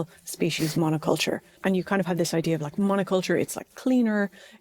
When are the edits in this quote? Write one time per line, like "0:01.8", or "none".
0:01.5

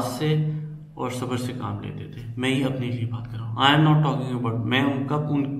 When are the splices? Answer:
none

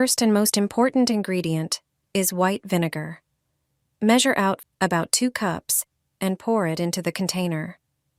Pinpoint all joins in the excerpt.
0:04.6

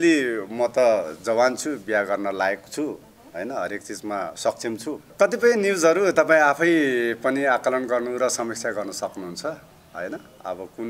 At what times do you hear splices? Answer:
0:05.1

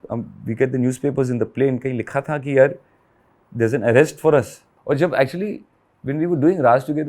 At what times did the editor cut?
0:04.7

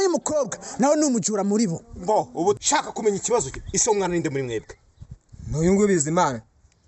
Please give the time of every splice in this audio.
0:02.6

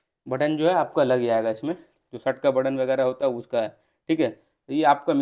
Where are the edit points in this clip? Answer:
none

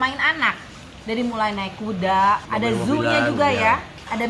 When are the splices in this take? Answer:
0:02.5

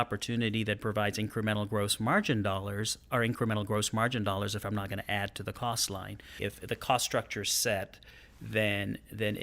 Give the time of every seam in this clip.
0:06.4

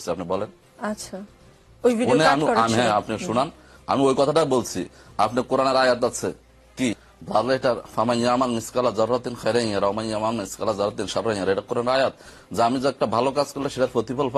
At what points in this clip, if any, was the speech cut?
0:07.0

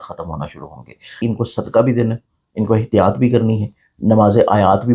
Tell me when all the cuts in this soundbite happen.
0:01.2

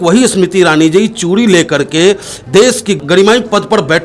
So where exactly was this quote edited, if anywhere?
0:03.0

